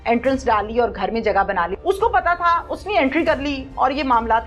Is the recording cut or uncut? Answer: cut